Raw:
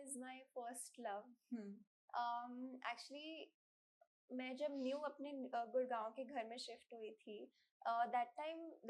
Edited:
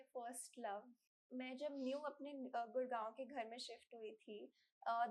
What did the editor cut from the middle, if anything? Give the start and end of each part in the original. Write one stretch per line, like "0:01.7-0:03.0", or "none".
0:01.4-0:03.9